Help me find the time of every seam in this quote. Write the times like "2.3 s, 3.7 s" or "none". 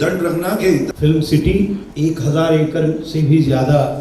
0.9 s, 1.8 s